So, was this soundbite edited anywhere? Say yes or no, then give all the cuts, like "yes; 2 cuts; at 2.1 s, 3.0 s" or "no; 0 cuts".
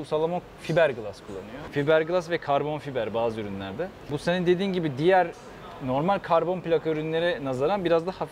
yes; 2 cuts; at 1.6 s, 4.2 s